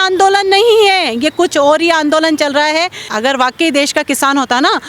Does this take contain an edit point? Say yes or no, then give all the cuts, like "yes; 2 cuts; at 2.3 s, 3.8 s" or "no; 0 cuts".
yes; 1 cut; at 3.1 s